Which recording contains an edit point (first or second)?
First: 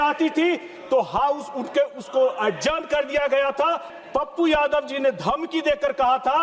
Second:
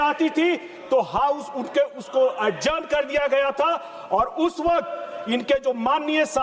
first